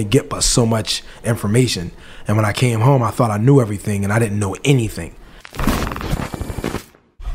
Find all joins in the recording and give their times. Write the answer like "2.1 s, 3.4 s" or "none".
5.5 s